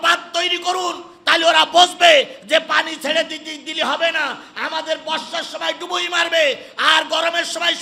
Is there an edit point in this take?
no; 0 cuts

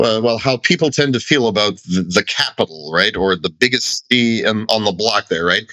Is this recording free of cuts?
yes; 0 cuts

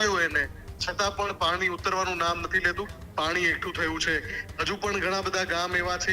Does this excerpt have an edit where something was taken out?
yes; 1 cut; at 3.0 s

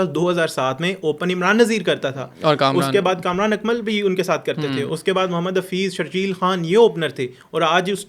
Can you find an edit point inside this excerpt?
no; 0 cuts

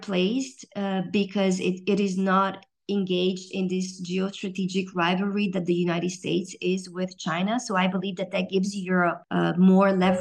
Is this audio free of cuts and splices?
no; 1 cut; at 9.2 s

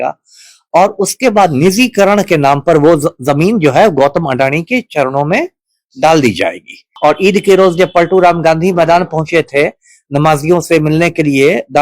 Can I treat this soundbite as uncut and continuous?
no; 1 cut; at 6.8 s

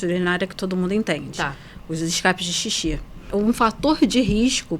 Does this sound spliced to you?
yes; 1 cut; at 3.3 s

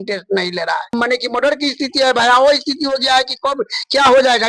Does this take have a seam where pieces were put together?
yes; 1 cut; at 0.9 s

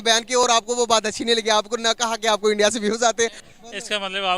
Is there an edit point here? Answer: yes; 1 cut; at 3.4 s

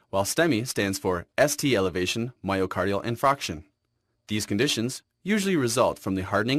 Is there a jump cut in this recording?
no; 0 cuts

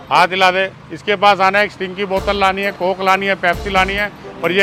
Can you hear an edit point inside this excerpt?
no; 0 cuts

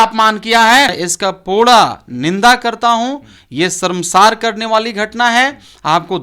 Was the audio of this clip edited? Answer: yes; 1 cut; at 1.0 s

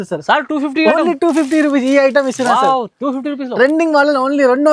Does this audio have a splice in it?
no; 0 cuts

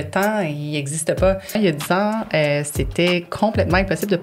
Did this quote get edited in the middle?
yes; 1 cut; at 1.6 s

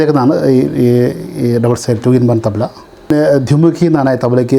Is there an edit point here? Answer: yes; 1 cut; at 3.1 s

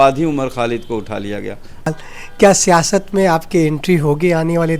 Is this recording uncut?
no; 1 cut; at 1.9 s

